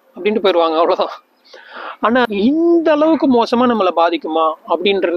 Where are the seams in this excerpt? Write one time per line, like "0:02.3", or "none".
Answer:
0:02.3